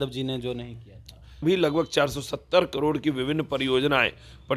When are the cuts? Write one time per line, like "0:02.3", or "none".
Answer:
0:01.4